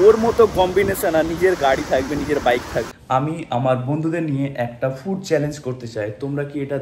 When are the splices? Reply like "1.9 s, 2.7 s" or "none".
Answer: 2.9 s